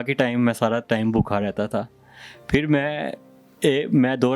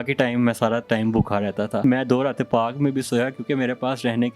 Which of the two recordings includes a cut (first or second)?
second